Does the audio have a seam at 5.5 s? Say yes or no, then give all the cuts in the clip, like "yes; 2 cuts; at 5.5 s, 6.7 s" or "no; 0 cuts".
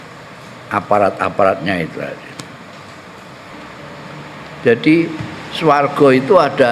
no; 1 cut; at 3.5 s